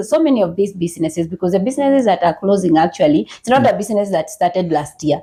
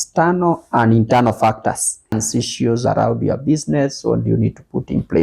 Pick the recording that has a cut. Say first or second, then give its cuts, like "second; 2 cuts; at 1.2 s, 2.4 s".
second; 1 cut; at 2.2 s